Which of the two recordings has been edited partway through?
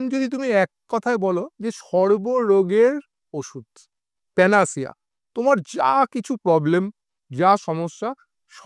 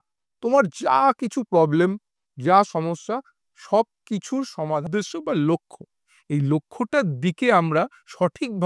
second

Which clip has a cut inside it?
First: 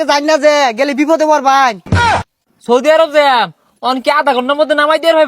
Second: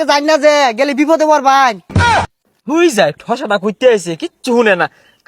first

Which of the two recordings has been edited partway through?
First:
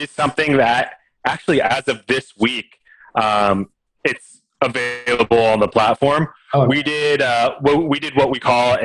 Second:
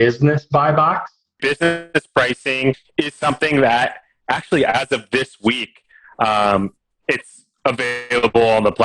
second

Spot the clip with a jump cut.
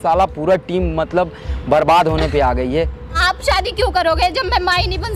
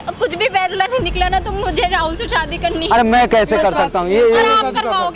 first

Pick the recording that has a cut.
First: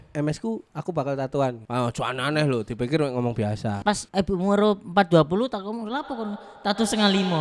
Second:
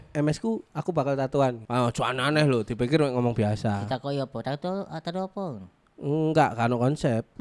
first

